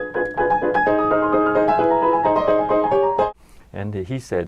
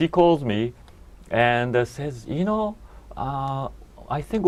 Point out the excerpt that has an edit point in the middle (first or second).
first